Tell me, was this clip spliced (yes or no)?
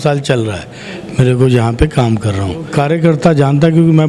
yes